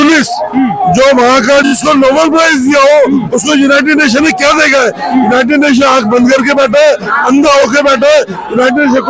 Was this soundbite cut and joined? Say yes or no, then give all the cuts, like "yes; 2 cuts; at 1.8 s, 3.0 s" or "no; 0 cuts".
yes; 1 cut; at 1.7 s